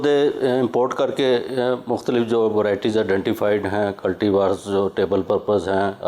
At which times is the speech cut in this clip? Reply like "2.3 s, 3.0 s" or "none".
none

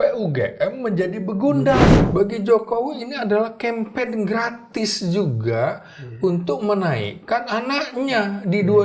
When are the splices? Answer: 2.0 s

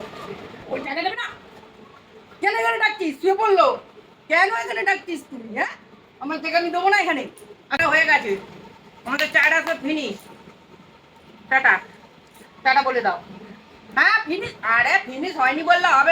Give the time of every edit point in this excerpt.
7.8 s

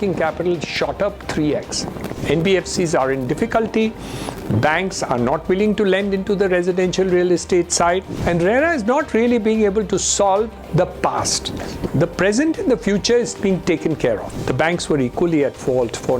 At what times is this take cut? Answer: 2.1 s, 8.1 s, 14.3 s

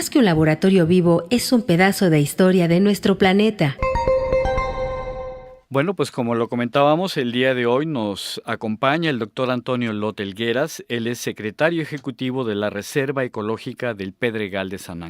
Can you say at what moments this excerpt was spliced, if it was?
1.4 s

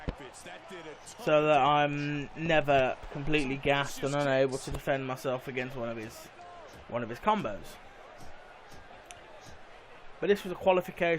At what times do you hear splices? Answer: 9.4 s

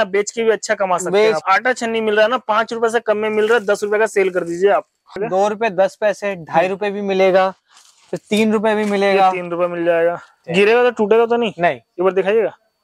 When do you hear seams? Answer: 1.4 s, 5.2 s, 10.4 s

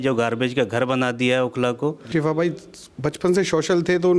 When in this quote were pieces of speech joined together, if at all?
2.1 s

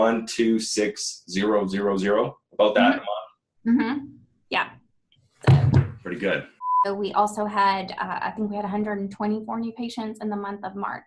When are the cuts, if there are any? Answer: 6.7 s

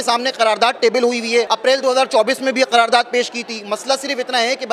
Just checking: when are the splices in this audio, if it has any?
none

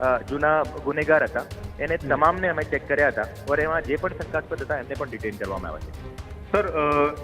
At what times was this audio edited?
none

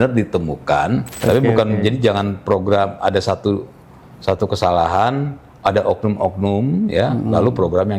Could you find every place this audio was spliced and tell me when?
1.1 s

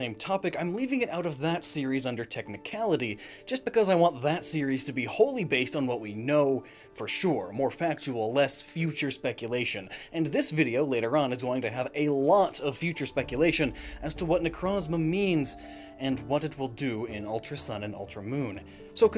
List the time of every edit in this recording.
11.7 s

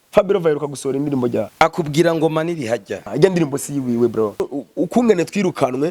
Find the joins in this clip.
1.5 s, 3.0 s, 4.4 s

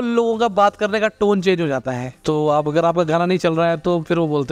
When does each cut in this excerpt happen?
2.1 s

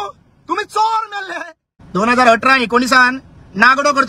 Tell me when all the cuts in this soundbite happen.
1.8 s

